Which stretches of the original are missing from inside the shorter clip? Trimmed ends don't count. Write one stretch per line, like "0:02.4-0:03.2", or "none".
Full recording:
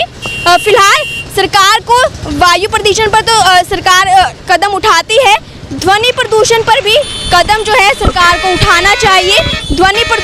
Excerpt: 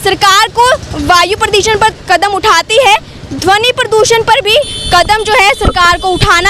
0:03.3-0:04.3